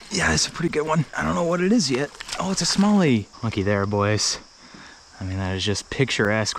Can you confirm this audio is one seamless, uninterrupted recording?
no; 2 cuts; at 1.1 s, 3.4 s

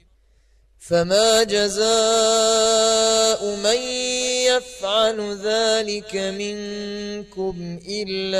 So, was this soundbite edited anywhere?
yes; 1 cut; at 7.1 s

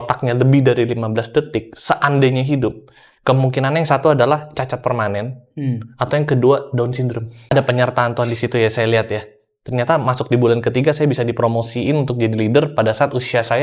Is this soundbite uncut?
no; 1 cut; at 7.5 s

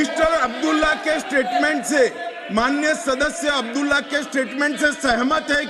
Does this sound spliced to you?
no; 0 cuts

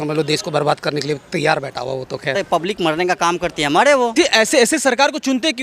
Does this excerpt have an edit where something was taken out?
yes; 2 cuts; at 2.4 s, 4.1 s

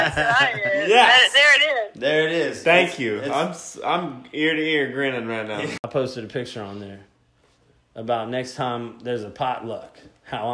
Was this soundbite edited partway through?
yes; 1 cut; at 5.8 s

